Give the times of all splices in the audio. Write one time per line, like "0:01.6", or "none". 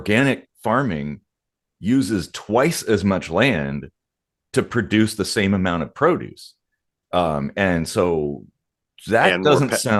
none